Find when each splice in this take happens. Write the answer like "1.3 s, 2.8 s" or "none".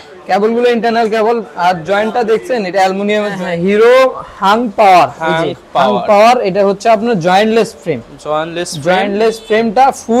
3.5 s